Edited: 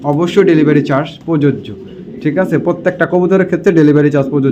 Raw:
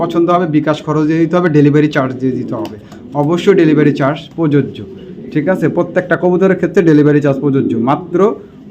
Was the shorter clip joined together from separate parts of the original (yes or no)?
no